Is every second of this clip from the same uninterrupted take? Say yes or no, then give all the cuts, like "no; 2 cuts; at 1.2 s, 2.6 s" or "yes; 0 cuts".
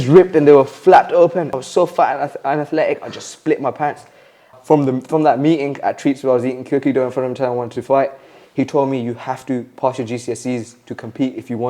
no; 2 cuts; at 1.5 s, 4.5 s